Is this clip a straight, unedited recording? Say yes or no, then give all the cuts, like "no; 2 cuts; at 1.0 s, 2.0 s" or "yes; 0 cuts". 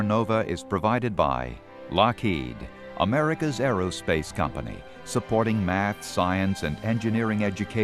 no; 1 cut; at 1.8 s